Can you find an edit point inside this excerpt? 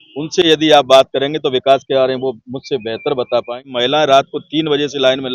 yes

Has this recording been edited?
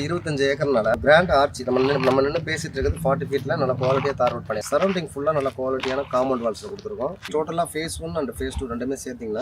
yes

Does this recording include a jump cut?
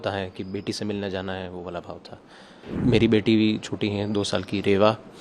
yes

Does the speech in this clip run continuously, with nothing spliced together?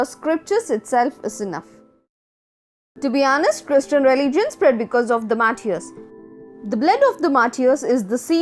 no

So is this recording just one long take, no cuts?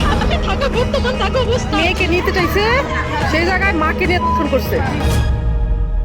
yes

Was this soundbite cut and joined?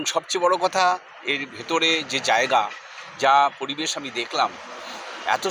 no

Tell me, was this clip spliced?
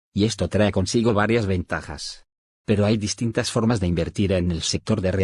no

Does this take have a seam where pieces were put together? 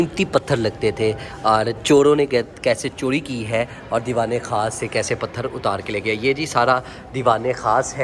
no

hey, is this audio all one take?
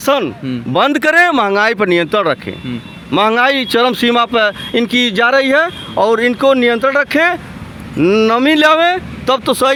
yes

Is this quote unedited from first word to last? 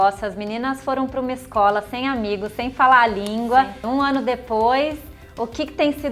no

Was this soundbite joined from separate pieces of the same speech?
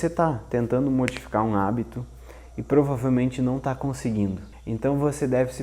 yes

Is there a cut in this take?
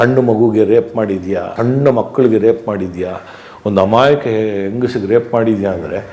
no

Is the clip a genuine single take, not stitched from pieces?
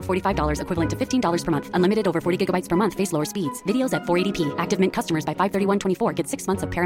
yes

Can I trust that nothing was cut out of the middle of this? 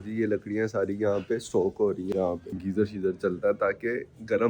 yes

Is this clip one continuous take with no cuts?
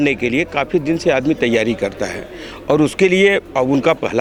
yes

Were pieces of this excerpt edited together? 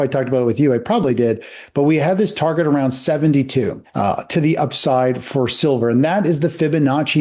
no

